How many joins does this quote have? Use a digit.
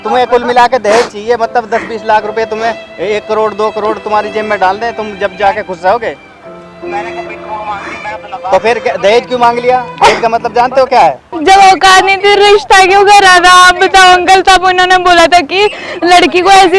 1